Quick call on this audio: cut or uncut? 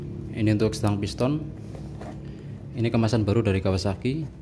uncut